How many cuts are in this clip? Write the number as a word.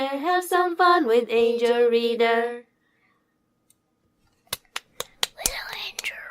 one